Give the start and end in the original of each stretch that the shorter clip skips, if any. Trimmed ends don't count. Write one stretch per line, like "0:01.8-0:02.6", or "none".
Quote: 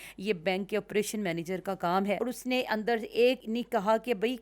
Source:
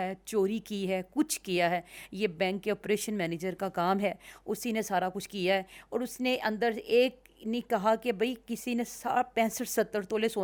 0:04.1-0:05.9
0:07.2-0:07.4